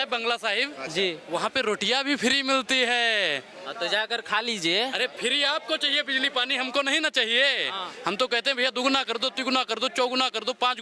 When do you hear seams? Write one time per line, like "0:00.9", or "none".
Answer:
none